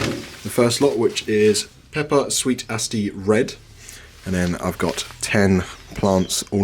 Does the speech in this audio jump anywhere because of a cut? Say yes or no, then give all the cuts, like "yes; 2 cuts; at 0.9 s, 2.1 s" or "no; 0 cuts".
no; 0 cuts